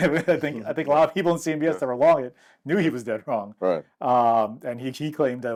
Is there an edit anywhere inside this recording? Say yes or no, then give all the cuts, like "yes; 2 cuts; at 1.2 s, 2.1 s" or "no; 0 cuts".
no; 0 cuts